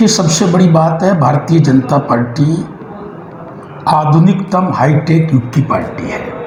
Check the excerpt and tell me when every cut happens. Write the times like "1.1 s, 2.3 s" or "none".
none